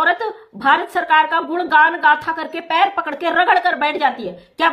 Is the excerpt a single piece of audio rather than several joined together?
yes; 0 cuts

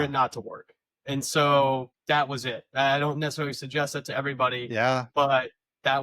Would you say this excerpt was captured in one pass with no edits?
no; 1 cut; at 1.9 s

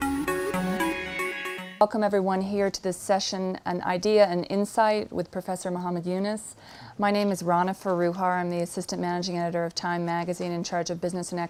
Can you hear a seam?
no; 0 cuts

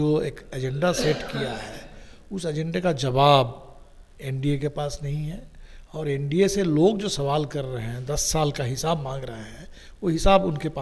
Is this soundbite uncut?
yes; 0 cuts

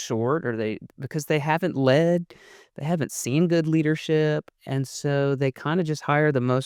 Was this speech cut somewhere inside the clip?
no; 0 cuts

